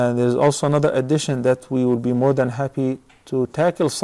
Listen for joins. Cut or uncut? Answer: uncut